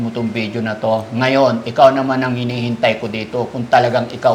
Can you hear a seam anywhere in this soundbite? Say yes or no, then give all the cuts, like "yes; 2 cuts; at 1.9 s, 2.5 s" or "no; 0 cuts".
no; 0 cuts